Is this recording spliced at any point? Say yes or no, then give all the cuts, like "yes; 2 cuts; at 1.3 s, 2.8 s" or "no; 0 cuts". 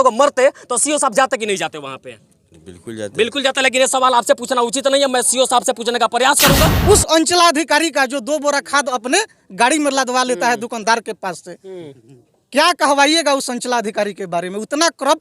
yes; 1 cut; at 6.8 s